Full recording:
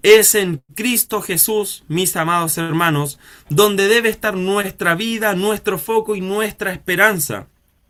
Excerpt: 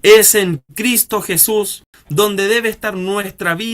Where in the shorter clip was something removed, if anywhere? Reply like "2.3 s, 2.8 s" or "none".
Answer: 1.8 s